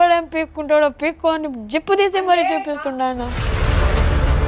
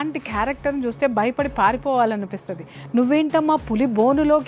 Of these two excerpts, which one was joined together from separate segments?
first; 1 cut; at 3.4 s

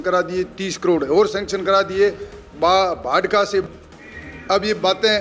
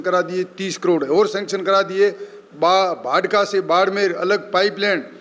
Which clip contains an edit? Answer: first; 1 cut; at 3.7 s

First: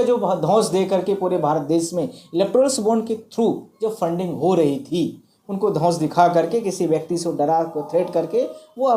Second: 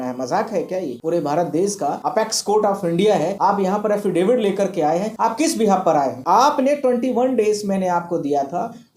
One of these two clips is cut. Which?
second; 5 cuts; at 0.9 s, 2.0 s, 3.3 s, 5.1 s, 6.2 s

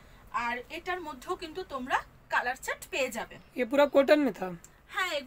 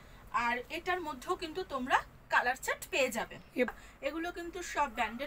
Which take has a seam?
second; 1 cut; at 3.7 s

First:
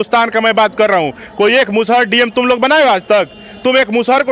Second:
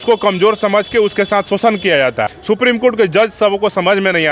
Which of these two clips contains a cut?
second; 1 cut; at 2.3 s

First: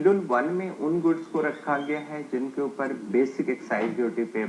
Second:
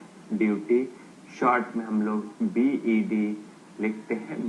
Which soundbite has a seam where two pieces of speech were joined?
second; 1 cut; at 2.3 s

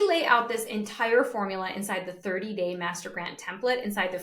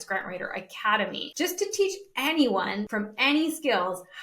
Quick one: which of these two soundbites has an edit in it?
second; 2 cuts; at 1.2 s, 2.9 s

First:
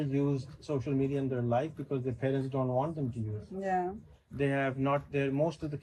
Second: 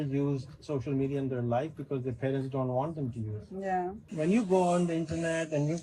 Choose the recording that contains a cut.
second; 1 cut; at 4.0 s

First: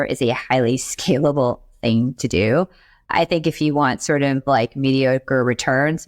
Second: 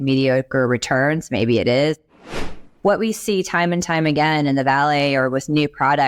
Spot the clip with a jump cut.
second; 1 cut; at 2.5 s

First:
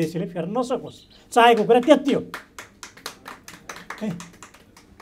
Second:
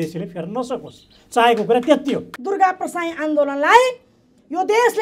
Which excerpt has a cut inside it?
second; 1 cut; at 2.3 s

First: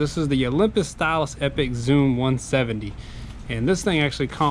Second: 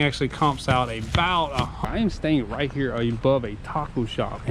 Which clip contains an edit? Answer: second; 1 cut; at 1.8 s

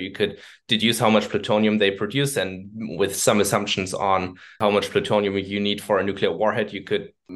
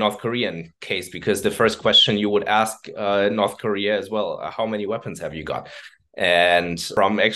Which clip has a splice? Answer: first; 1 cut; at 4.6 s

